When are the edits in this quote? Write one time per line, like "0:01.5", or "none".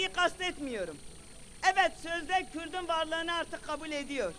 none